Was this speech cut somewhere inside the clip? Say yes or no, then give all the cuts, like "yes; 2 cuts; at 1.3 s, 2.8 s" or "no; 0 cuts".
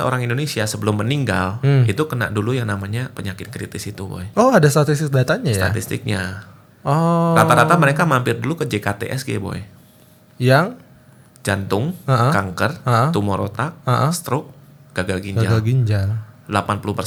no; 0 cuts